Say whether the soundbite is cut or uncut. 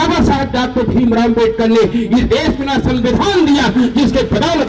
uncut